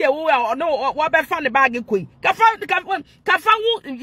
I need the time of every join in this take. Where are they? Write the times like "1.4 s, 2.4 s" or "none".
none